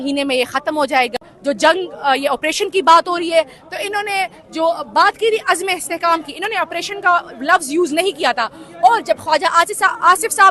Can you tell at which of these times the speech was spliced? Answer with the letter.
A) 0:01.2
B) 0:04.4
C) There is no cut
A